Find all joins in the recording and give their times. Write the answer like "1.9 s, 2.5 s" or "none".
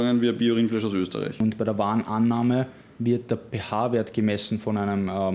1.4 s